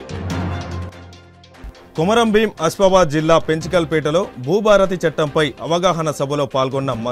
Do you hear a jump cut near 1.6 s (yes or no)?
no